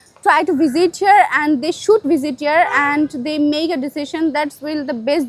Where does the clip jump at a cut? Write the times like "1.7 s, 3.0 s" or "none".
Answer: 2.0 s